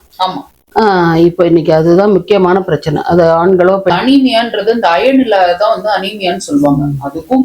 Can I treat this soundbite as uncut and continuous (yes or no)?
no